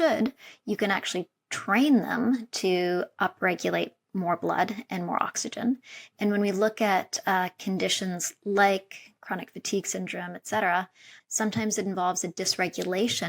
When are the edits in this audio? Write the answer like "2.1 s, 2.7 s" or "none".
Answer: 11.1 s